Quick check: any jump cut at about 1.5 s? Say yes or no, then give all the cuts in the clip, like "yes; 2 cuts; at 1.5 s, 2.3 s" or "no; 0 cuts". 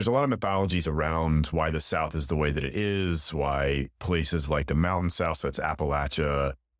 yes; 1 cut; at 1.5 s